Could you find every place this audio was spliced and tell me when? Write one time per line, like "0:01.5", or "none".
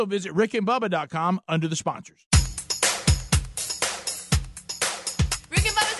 0:02.1